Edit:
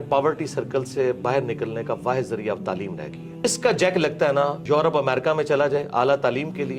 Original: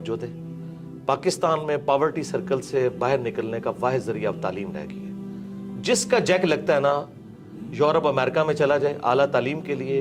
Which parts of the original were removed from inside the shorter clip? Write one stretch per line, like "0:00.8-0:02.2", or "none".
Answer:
0:05.2-0:05.9
0:07.1-0:07.7